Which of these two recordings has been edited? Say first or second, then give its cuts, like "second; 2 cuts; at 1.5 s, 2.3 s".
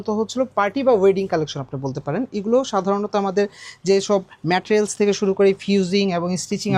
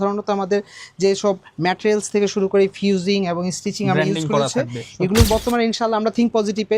second; 1 cut; at 5.3 s